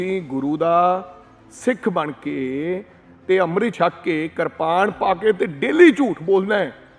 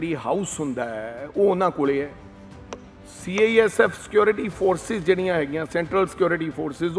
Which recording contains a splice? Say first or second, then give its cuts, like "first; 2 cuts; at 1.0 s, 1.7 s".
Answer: first; 1 cut; at 3.7 s